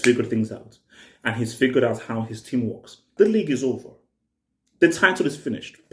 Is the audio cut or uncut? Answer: cut